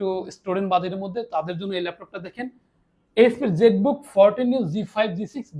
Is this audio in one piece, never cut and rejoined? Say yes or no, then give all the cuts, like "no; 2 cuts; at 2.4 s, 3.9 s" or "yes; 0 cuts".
yes; 0 cuts